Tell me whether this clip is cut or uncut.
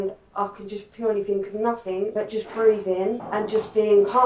cut